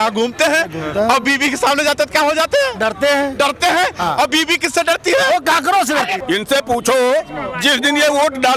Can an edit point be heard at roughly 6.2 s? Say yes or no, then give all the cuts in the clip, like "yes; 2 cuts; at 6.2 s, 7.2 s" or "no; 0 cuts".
yes; 1 cut; at 6.2 s